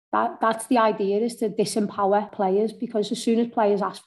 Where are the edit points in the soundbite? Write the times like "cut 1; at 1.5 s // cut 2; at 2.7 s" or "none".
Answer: cut 1; at 2.3 s